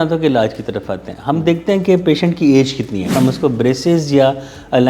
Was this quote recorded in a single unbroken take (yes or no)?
no